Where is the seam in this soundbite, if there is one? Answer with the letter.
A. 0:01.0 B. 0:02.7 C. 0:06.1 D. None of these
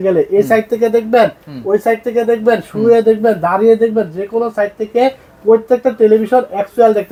D